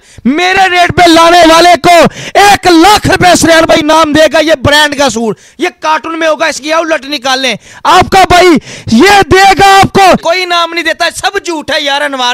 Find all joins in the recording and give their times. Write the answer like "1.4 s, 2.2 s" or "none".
10.2 s